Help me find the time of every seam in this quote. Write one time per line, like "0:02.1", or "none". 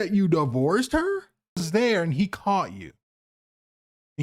0:01.7